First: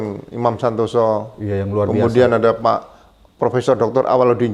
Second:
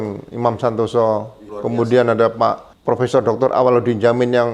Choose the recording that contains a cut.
second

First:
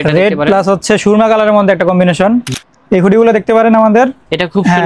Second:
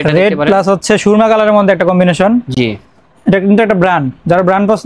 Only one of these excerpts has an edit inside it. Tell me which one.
first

